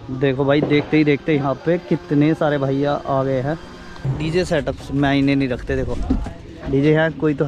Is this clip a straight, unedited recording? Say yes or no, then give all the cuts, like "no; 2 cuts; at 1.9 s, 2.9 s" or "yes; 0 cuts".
no; 1 cut; at 4.1 s